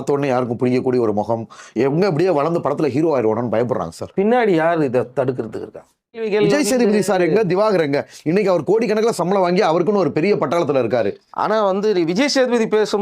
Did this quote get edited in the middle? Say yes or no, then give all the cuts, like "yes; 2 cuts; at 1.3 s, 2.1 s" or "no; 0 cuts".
yes; 1 cut; at 6.2 s